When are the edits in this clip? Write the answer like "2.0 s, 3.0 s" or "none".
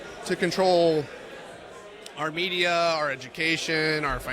none